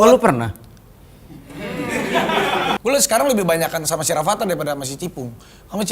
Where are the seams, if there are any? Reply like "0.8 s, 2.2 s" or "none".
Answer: 2.8 s